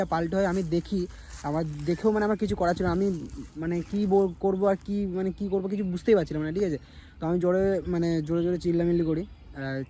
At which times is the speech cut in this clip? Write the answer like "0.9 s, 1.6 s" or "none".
none